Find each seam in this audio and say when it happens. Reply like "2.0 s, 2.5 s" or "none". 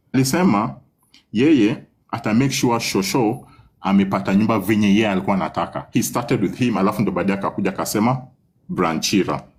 none

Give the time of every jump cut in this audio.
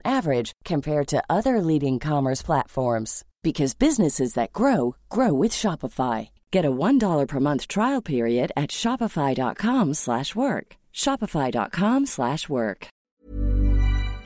13.0 s

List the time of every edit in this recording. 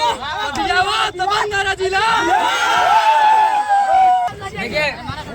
4.3 s

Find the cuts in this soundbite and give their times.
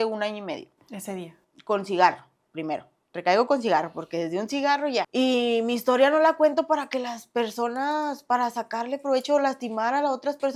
5.1 s

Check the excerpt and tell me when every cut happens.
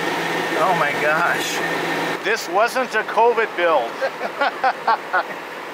2.2 s

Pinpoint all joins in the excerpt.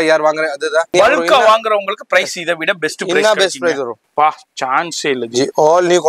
0.9 s, 4.0 s

